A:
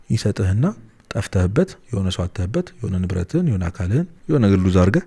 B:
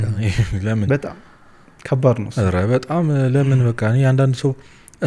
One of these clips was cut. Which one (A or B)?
A